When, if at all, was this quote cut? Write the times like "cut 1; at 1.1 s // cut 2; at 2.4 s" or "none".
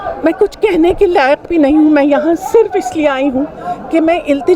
none